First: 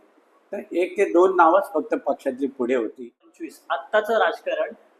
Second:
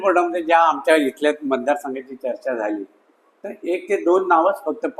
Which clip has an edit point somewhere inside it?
first; 1 cut; at 3.3 s

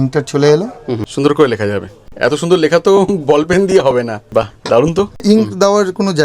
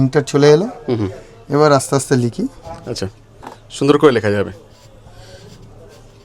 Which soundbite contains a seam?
first; 4 cuts; at 1.1 s, 2.1 s, 4.2 s, 5.2 s

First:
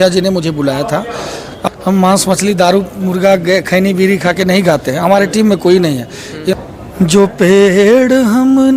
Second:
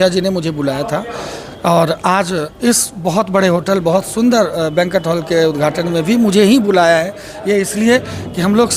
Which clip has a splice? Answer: first; 2 cuts; at 1.5 s, 6.5 s

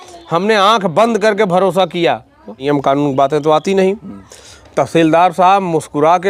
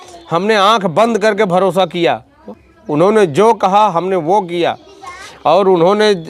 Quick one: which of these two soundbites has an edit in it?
first; 1 cut; at 2.7 s

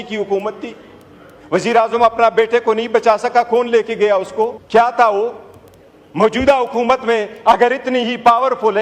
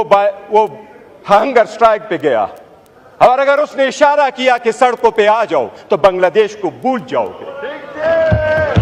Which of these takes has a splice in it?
first; 1 cut; at 4.6 s

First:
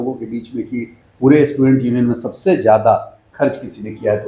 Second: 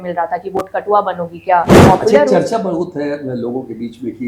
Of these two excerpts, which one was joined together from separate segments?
second; 1 cut; at 1.7 s

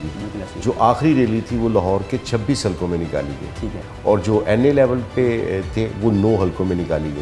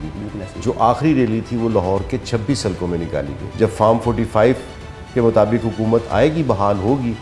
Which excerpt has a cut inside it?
second; 1 cut; at 3.4 s

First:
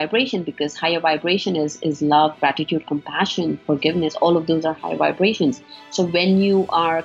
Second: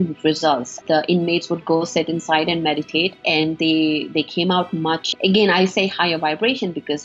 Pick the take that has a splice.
second; 3 cuts; at 0.8 s, 3.2 s, 5.1 s

